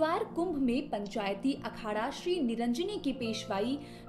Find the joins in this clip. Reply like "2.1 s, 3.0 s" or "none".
1.4 s